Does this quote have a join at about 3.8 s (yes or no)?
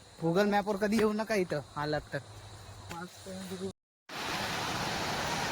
yes